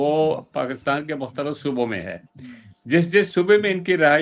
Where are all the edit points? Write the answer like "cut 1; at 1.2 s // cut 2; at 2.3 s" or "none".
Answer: none

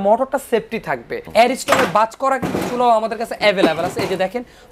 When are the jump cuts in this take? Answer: cut 1; at 1.2 s

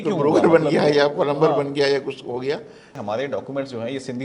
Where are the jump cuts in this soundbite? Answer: cut 1; at 2.9 s

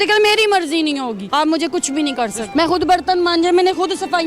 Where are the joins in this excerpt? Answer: cut 1; at 1.2 s // cut 2; at 2.4 s

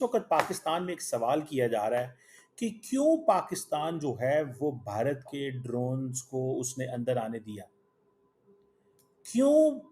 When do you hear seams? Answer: none

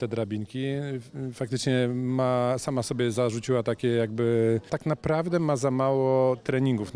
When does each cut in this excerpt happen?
cut 1; at 4.7 s

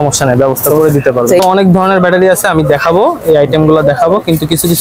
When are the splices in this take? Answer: cut 1; at 1.4 s

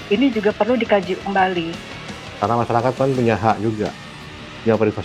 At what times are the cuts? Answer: cut 1; at 1.8 s

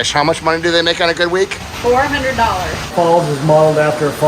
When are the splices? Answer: cut 1; at 2.9 s

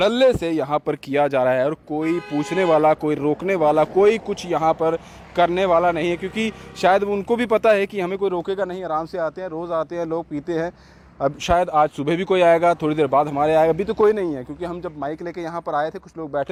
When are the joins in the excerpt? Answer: none

